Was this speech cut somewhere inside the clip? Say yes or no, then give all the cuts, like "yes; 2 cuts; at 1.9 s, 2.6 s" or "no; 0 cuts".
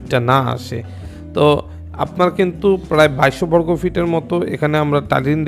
no; 0 cuts